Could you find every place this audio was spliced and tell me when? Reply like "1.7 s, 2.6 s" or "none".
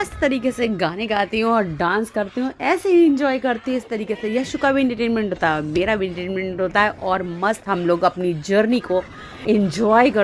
none

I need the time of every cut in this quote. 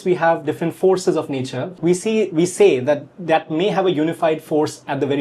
1.6 s

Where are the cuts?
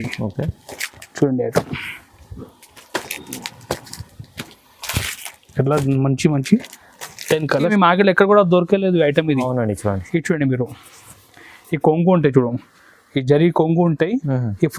7.7 s

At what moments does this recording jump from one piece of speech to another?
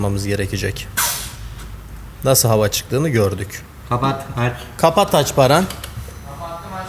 none

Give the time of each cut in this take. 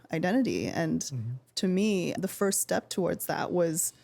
1.4 s

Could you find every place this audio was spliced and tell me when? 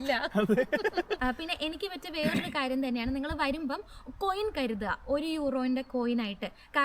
1.2 s

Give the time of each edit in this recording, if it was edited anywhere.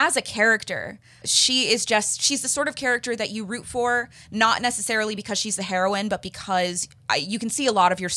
1.2 s

